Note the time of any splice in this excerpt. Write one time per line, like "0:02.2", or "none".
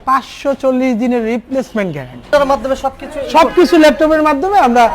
0:02.2